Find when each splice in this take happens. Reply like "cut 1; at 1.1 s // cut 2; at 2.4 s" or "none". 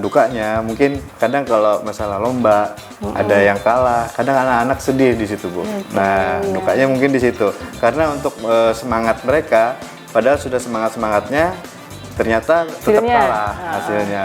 cut 1; at 1.1 s // cut 2; at 12.8 s